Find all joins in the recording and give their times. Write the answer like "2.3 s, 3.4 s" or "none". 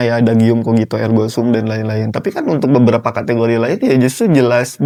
none